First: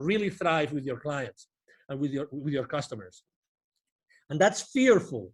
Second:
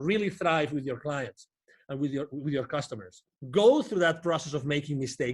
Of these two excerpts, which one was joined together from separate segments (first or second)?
second